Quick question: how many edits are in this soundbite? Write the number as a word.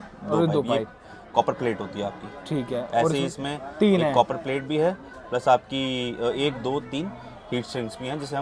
zero